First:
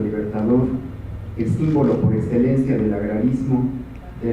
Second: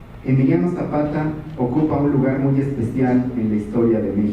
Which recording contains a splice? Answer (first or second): first